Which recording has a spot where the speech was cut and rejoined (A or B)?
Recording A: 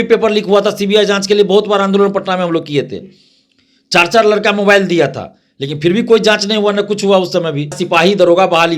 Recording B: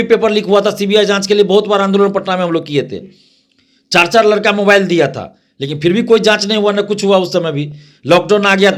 A